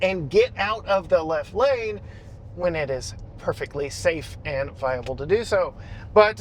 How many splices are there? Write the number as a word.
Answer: zero